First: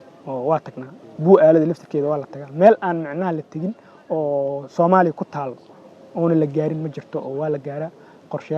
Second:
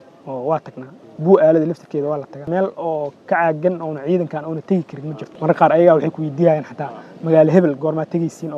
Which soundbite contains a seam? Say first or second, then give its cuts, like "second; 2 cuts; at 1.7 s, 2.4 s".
second; 2 cuts; at 2.5 s, 5.3 s